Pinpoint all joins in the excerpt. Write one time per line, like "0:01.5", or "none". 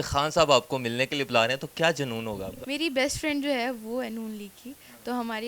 0:02.5

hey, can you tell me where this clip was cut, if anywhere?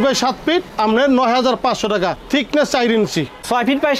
none

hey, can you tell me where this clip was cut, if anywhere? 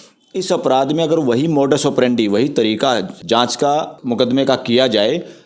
0:03.2
0:03.9

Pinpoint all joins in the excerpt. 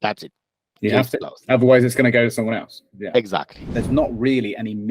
0:03.6

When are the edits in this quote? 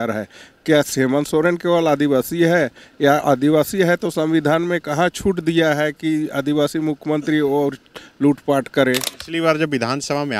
0:09.2

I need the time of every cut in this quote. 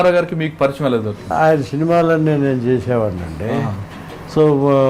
0:01.2

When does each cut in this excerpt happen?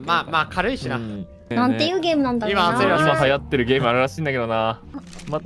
0:01.5

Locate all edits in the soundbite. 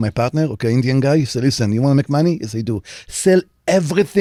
none

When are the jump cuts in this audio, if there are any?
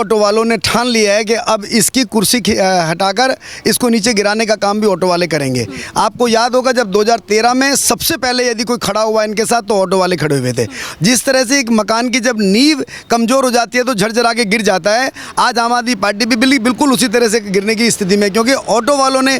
none

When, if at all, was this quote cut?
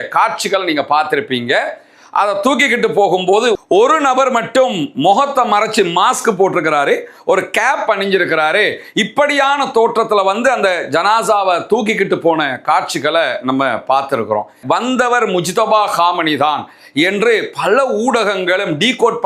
0:14.6

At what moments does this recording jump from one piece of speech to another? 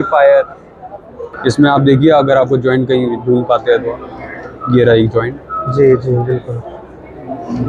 0:01.3

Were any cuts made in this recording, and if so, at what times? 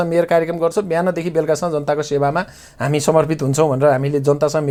none

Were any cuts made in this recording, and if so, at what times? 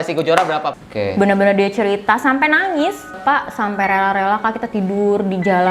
0:00.7
0:03.2

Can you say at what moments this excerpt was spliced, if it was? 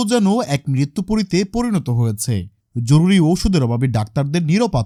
none

